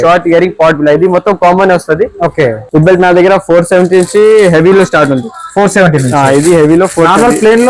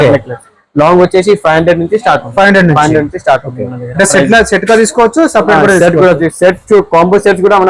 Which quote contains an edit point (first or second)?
first